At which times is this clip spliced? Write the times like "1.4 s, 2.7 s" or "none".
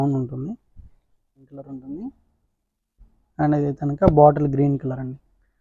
1.7 s